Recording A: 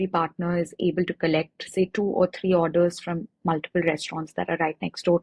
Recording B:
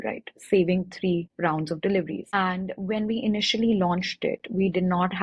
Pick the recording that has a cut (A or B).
B